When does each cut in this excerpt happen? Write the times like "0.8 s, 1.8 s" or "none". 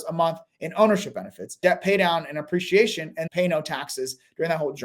1.6 s, 3.2 s